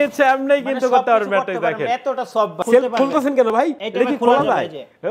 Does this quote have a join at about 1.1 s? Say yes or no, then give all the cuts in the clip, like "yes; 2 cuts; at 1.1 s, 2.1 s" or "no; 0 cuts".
no; 2 cuts; at 2.6 s, 3.8 s